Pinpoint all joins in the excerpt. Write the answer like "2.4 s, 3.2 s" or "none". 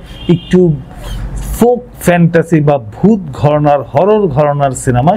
none

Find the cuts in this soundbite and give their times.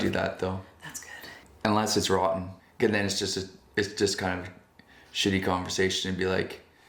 1.4 s, 2.6 s

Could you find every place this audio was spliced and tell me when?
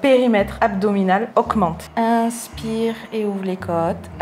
1.8 s

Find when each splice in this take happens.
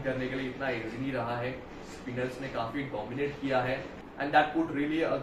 4.0 s

